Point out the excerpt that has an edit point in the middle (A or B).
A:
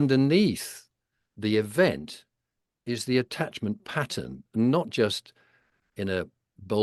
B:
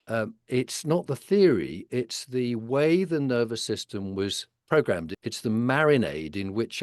B